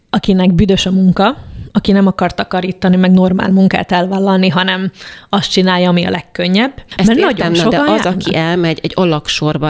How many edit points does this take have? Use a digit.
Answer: 1